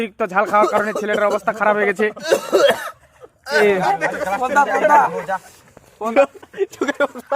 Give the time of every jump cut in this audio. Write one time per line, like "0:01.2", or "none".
0:03.6
0:06.1